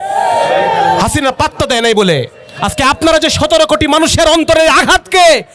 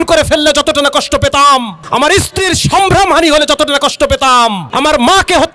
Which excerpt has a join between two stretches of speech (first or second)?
second